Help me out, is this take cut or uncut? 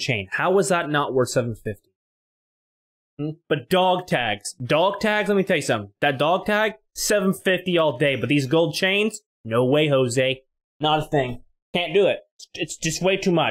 uncut